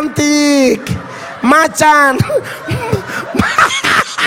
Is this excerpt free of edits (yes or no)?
yes